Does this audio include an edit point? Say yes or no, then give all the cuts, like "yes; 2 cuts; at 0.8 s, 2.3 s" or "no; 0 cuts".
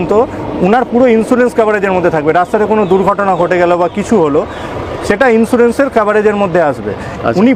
no; 0 cuts